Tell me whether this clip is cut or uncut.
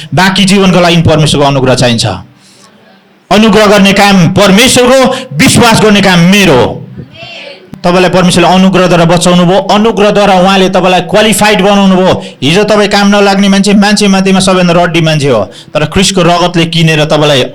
cut